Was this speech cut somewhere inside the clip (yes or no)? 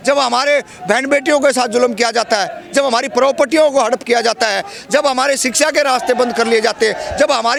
no